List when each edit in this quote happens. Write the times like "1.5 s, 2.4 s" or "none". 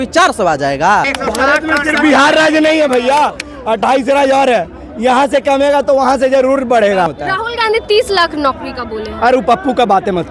1.2 s, 7.2 s